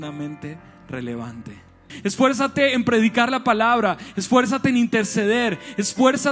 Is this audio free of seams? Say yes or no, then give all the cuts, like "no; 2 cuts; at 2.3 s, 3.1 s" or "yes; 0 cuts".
no; 1 cut; at 1.9 s